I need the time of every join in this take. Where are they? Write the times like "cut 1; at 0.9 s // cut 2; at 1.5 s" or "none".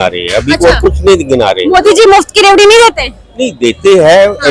none